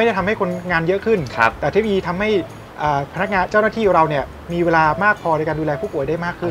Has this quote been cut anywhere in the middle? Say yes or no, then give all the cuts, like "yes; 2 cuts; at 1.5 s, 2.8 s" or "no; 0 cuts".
no; 0 cuts